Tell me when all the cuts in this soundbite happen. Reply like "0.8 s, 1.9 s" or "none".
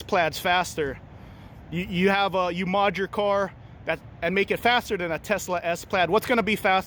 none